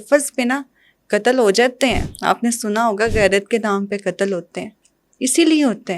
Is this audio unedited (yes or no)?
no